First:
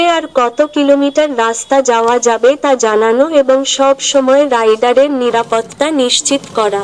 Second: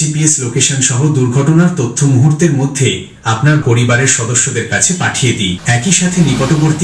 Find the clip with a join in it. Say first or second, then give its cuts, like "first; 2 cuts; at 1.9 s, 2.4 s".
second; 2 cuts; at 3.6 s, 5.6 s